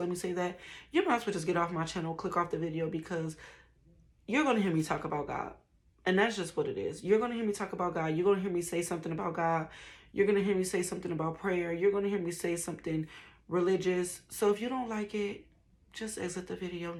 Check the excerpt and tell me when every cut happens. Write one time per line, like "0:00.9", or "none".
none